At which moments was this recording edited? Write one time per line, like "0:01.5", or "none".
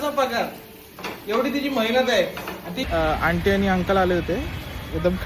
0:02.8